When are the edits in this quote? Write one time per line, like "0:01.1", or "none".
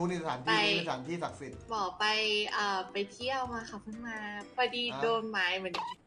0:01.6